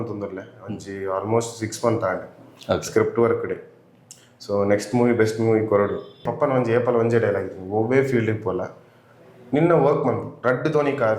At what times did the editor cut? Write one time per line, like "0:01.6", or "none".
0:06.3